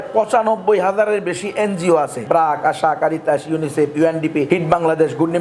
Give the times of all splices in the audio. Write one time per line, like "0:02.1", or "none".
0:02.2
0:04.5

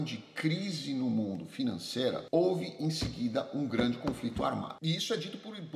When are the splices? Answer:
0:04.7

